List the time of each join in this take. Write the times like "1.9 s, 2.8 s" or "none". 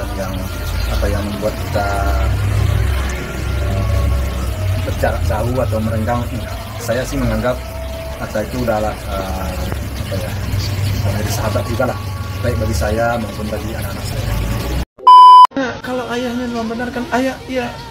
14.8 s, 15.5 s